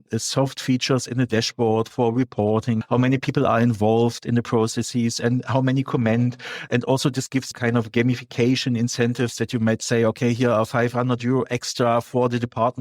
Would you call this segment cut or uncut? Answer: cut